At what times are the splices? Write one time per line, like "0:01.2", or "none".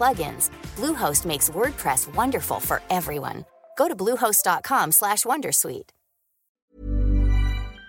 0:06.6